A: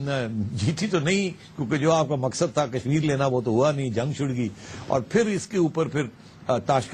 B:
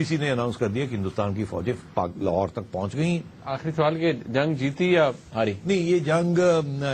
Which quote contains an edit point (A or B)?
B